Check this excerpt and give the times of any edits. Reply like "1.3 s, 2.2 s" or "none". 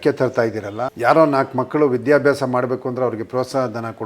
0.9 s